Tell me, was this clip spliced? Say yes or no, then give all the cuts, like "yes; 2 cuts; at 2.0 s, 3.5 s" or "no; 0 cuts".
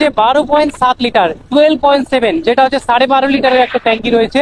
no; 0 cuts